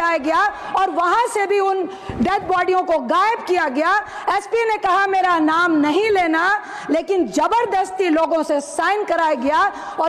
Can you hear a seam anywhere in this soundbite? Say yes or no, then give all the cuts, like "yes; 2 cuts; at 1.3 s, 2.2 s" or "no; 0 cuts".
no; 0 cuts